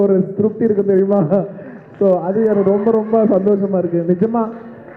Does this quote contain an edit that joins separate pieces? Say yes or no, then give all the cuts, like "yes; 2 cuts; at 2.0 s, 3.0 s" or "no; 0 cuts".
no; 0 cuts